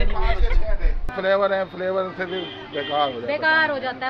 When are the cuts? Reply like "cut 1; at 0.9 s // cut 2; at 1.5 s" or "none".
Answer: cut 1; at 1.1 s